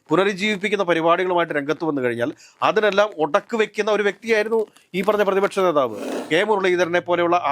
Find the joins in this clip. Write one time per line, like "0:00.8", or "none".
0:06.1